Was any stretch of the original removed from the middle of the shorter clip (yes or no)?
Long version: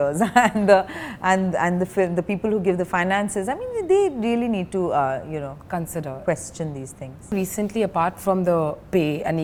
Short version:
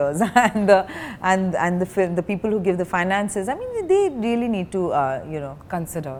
no